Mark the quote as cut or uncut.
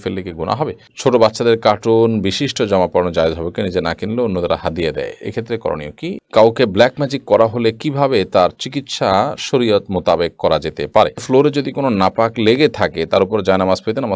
cut